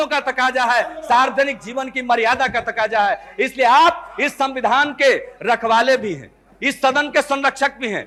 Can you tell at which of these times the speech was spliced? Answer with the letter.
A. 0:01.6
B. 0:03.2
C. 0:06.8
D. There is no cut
D